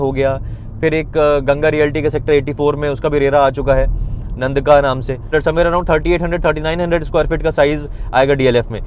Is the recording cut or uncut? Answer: cut